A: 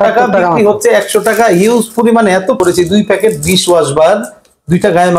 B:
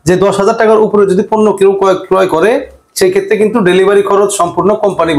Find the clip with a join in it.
A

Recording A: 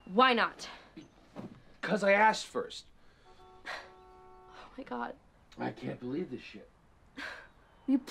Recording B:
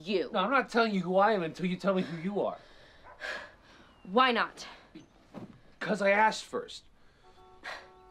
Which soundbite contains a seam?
A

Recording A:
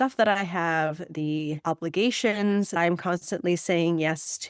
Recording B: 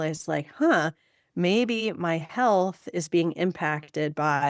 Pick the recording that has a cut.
A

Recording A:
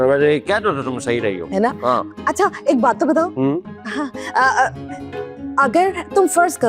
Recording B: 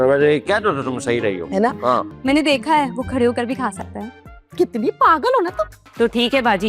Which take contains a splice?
B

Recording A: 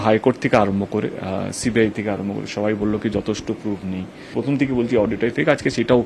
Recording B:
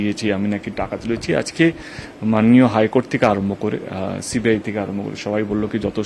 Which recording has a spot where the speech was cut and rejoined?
A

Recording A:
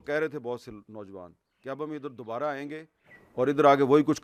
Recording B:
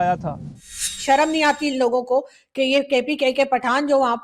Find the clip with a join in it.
B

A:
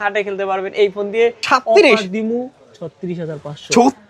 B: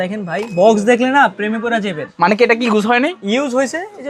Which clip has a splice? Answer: A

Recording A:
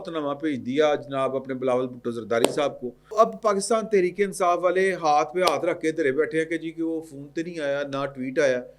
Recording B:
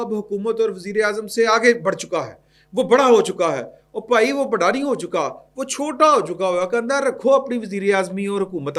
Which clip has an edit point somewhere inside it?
A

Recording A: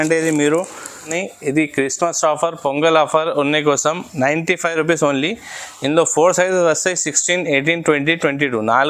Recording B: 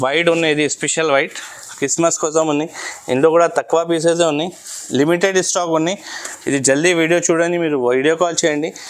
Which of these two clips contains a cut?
A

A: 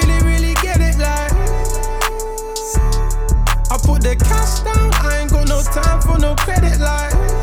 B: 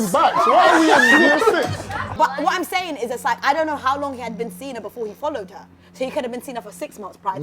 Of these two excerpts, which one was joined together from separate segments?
B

